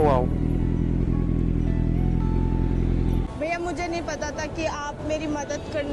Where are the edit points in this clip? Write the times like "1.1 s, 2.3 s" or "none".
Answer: 3.4 s